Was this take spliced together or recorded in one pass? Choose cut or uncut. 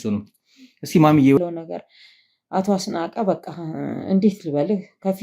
cut